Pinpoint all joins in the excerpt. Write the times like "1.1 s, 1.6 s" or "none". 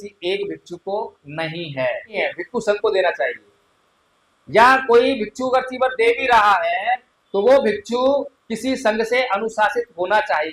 2.2 s